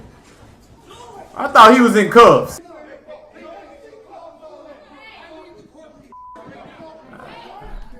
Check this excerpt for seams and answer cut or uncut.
cut